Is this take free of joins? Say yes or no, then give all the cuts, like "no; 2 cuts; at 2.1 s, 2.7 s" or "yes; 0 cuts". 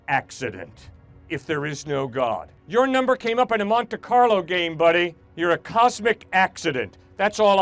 no; 2 cuts; at 2.5 s, 5.2 s